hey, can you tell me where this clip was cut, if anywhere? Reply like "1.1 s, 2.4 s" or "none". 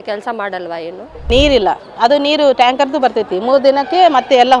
1.2 s